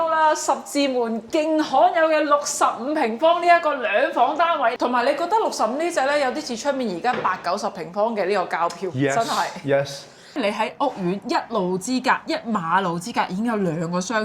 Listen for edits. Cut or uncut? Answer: cut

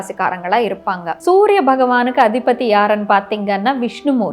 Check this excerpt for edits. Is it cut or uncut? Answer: cut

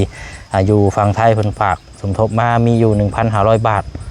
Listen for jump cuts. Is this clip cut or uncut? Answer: uncut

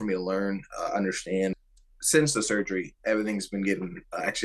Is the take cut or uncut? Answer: cut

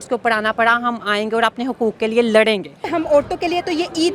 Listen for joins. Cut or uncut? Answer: cut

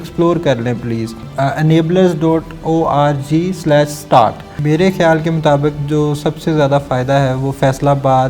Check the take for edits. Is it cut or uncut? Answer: cut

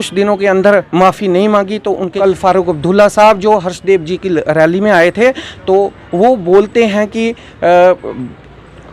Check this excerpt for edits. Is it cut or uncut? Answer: cut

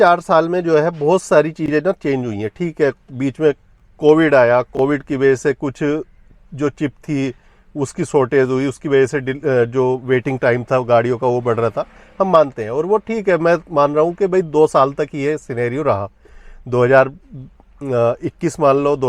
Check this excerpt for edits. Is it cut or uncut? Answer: uncut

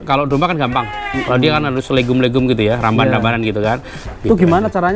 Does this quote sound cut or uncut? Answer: cut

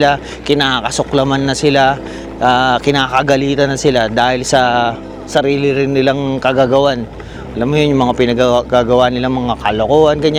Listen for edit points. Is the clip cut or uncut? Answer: uncut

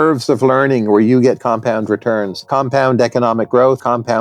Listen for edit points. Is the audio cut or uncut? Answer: cut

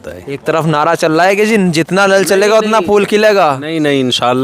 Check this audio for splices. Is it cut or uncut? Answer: uncut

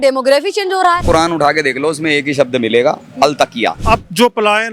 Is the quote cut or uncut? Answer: cut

